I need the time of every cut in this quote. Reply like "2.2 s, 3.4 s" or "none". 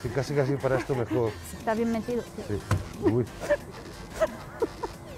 1.5 s